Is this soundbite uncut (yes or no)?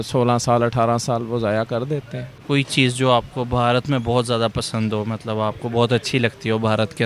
no